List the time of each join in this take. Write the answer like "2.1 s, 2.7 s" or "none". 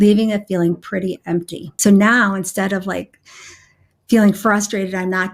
1.6 s